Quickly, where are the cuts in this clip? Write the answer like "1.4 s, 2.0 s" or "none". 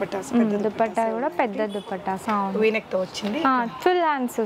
2.2 s